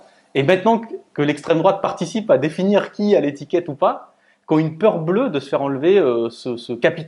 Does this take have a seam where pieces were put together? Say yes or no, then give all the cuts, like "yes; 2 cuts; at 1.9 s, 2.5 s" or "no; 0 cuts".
no; 0 cuts